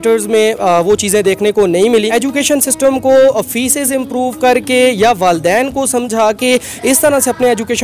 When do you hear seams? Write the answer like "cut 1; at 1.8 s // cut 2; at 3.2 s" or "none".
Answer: cut 1; at 2.1 s